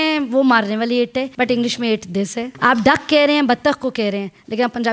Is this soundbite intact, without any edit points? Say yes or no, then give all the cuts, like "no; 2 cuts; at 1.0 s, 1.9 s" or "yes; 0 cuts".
no; 2 cuts; at 1.3 s, 2.5 s